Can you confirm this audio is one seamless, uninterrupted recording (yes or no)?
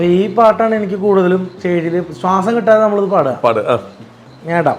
no